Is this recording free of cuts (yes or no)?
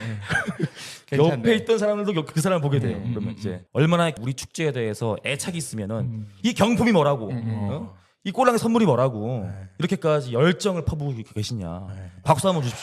no